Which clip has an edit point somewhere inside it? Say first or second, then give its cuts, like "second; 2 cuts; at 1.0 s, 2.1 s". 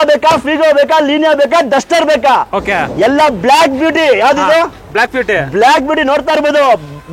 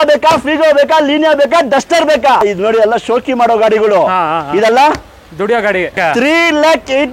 second; 2 cuts; at 2.4 s, 5.9 s